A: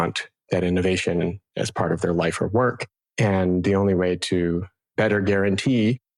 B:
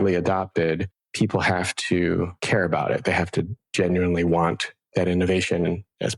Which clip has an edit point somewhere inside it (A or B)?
B